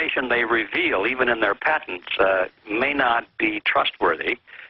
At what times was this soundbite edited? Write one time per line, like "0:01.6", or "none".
0:02.6